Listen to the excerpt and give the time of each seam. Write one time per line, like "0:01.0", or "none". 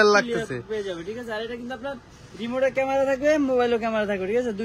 none